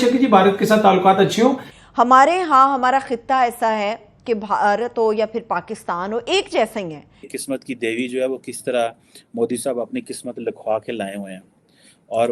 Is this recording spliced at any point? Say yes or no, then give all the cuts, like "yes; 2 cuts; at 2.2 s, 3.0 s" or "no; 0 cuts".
yes; 1 cut; at 7.4 s